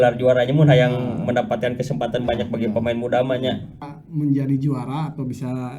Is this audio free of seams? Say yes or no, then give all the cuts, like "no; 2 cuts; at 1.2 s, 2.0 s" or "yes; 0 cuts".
no; 1 cut; at 3.9 s